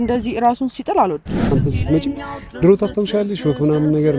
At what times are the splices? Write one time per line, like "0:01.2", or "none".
0:01.5